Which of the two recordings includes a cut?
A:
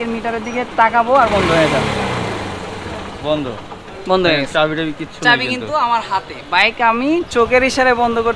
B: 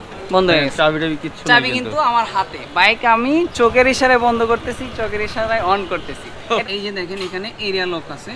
B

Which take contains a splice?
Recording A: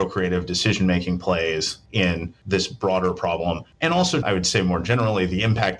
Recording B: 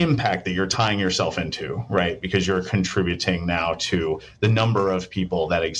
A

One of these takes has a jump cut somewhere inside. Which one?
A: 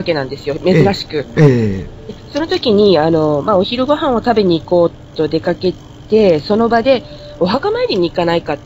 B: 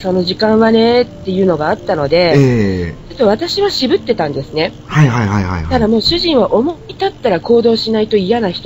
A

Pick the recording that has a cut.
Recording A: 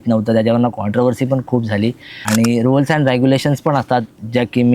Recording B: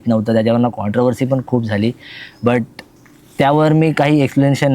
A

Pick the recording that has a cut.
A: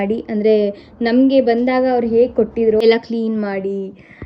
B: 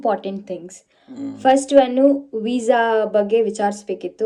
A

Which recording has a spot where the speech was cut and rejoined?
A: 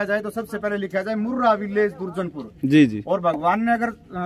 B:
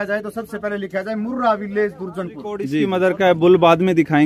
B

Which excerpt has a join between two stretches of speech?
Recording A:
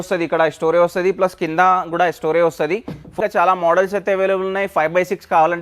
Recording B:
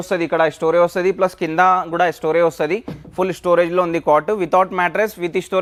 A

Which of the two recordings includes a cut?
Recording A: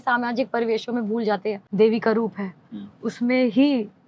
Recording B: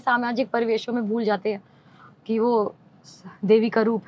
A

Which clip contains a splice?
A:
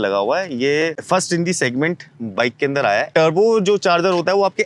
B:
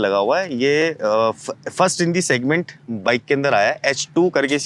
A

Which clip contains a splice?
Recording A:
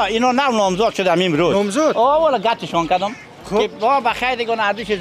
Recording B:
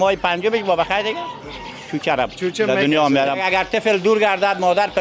B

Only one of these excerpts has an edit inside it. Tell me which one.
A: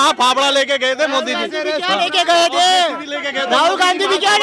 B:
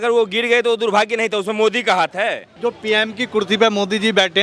B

